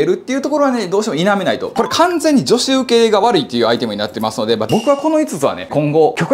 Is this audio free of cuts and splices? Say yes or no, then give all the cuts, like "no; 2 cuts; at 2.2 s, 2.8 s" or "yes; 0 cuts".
no; 2 cuts; at 1.7 s, 4.7 s